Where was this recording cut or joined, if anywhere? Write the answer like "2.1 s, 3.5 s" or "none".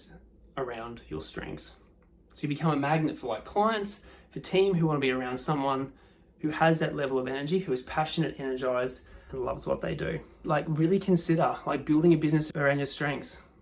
10.4 s, 12.5 s